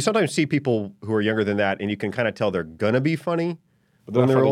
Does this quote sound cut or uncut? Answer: uncut